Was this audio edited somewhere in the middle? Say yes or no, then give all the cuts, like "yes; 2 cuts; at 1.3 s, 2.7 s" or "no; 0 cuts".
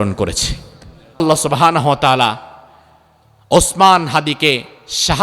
yes; 1 cut; at 1.2 s